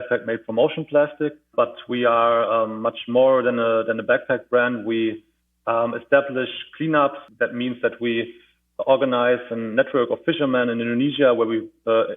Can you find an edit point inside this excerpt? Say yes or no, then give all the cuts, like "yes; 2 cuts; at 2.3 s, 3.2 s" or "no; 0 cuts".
yes; 2 cuts; at 1.4 s, 7.2 s